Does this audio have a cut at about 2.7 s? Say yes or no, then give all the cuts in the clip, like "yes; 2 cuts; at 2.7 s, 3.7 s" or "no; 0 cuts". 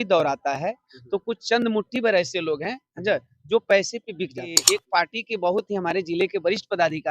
no; 1 cut; at 4.6 s